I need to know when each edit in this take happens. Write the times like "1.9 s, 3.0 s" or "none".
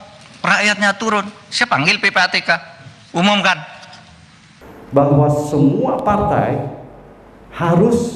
4.6 s

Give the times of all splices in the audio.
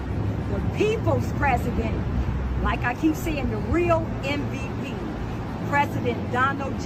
none

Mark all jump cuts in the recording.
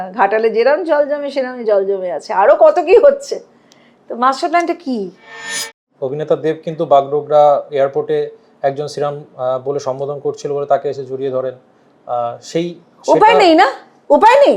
5.8 s

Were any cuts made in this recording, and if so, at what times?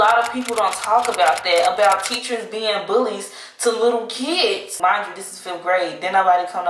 4.7 s

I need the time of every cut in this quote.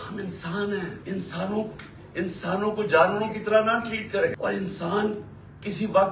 1.0 s, 4.4 s

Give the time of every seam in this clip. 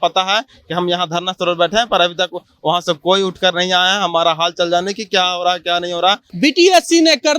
6.3 s

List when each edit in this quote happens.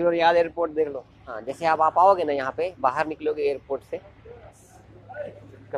1.5 s, 4.6 s

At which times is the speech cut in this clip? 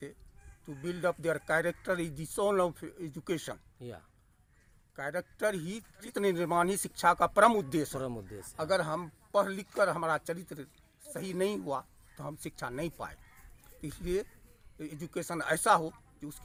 none

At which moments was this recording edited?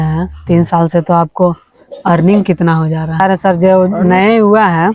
3.2 s

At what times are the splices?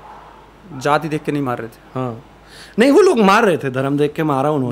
none

